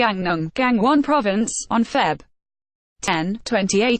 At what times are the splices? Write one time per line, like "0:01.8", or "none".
0:03.1